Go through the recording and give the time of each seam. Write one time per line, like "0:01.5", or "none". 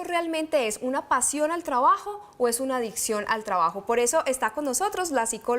0:03.6